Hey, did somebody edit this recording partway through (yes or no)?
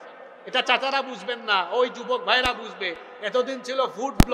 no